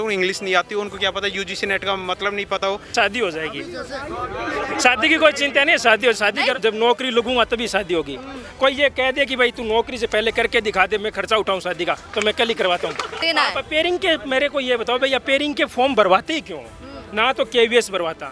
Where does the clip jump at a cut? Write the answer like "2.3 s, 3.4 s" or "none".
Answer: 2.9 s, 6.6 s, 13.2 s